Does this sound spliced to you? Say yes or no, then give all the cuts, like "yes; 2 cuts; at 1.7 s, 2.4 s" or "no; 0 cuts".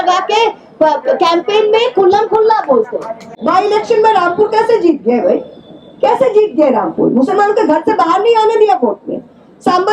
yes; 1 cut; at 3.4 s